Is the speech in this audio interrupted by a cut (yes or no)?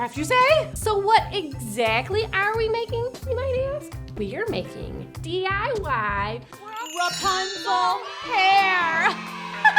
yes